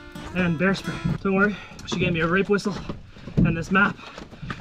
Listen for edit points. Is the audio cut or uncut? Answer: cut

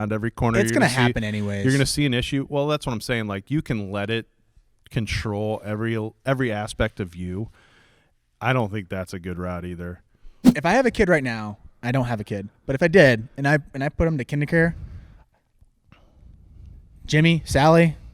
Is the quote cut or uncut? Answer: cut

